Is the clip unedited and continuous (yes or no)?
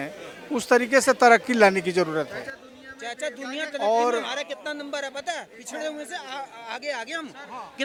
yes